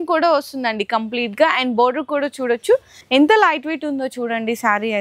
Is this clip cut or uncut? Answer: cut